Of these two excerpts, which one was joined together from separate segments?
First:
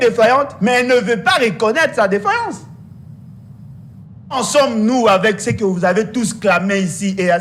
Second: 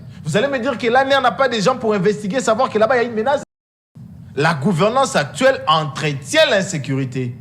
second; 1 cut; at 3.5 s

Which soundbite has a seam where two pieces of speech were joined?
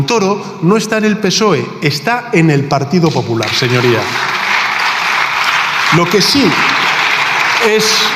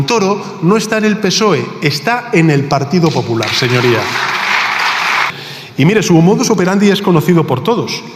second; 1 cut; at 5.3 s

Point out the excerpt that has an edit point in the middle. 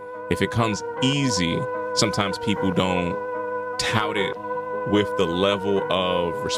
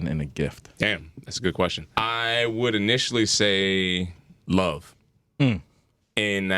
second; 2 cuts; at 1.8 s, 4.3 s

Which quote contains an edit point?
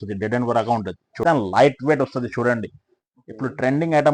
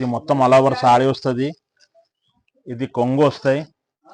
first; 1 cut; at 1.2 s

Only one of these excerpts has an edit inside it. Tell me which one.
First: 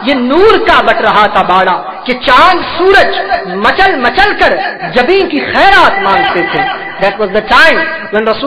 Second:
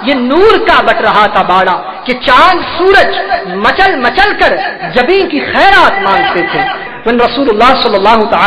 second; 1 cut; at 6.9 s

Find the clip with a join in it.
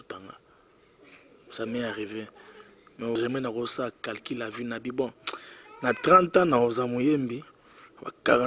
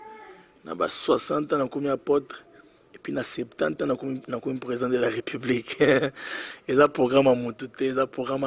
first; 1 cut; at 3.2 s

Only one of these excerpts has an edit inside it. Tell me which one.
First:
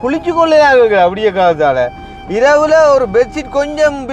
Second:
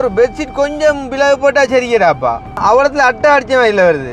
second; 1 cut; at 2.6 s

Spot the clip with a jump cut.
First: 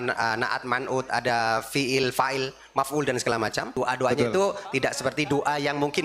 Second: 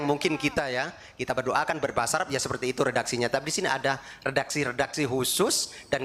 first; 2 cuts; at 3.7 s, 4.7 s

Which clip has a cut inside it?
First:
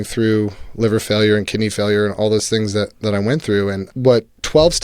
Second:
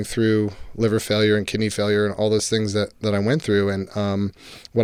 first; 1 cut; at 3.9 s

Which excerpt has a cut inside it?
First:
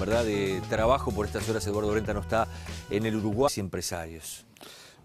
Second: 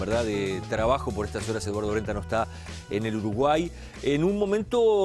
second; 1 cut; at 3.5 s

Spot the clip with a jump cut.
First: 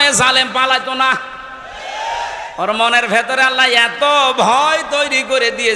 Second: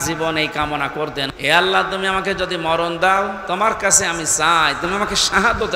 second; 1 cut; at 1.3 s

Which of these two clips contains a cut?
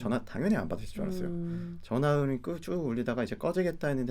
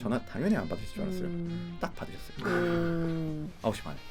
second; 1 cut; at 1.8 s

